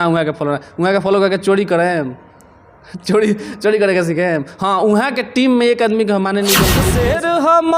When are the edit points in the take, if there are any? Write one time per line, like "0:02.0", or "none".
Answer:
0:06.8